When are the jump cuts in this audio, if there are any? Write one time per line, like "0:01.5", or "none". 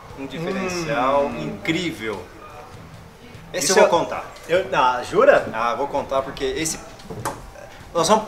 none

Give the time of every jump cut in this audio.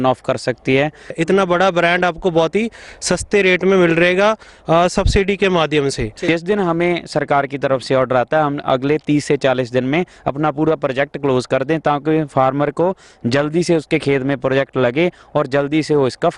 0:01.1
0:06.2

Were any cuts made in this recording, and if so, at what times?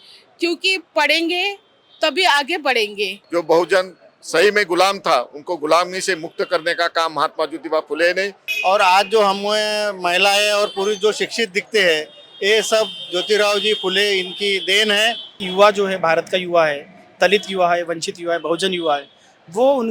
0:03.2
0:08.4
0:15.4

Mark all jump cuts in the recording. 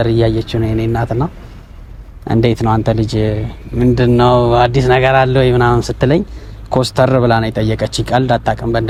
none

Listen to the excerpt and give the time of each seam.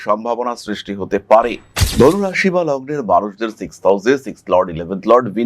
0:01.8

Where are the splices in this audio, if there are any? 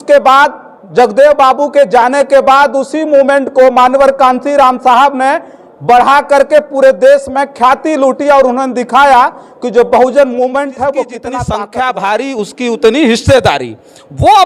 0:11.3

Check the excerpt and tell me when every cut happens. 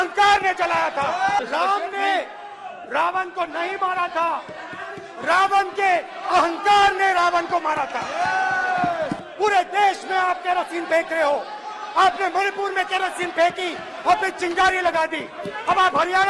0:01.4
0:09.2

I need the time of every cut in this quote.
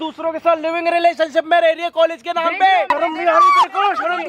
0:02.9

